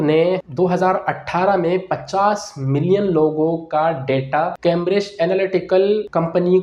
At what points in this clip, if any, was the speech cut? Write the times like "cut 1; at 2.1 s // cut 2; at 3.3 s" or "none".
none